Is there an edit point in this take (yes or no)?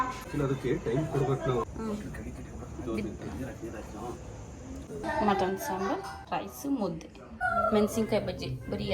yes